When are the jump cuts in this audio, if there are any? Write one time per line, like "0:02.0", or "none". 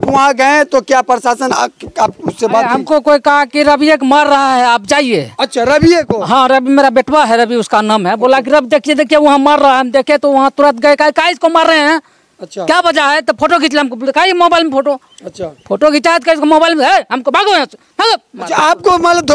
none